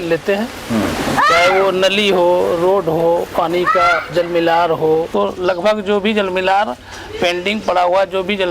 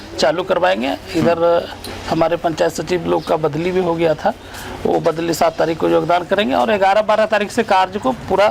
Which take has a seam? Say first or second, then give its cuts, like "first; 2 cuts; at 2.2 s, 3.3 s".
first; 1 cut; at 5.1 s